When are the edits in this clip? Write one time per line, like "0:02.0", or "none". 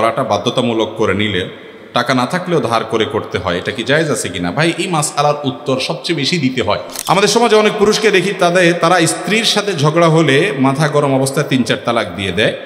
0:06.9